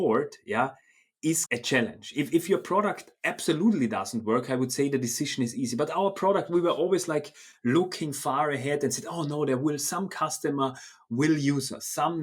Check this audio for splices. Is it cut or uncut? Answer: uncut